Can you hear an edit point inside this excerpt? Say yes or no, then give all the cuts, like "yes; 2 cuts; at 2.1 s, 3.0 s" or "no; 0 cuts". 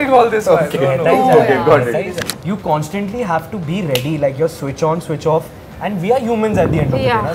yes; 1 cut; at 2.3 s